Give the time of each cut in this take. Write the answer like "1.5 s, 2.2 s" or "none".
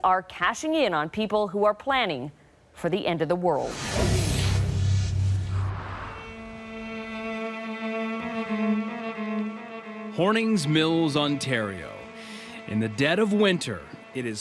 3.7 s